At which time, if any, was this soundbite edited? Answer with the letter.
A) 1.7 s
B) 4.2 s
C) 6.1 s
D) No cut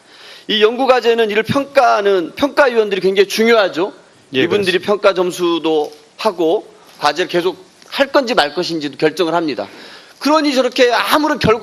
B